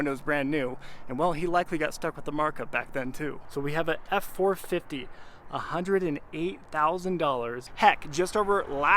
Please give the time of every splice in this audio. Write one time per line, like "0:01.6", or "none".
0:03.4
0:07.6